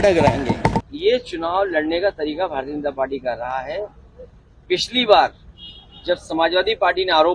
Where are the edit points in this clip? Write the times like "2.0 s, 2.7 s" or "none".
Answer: 0.9 s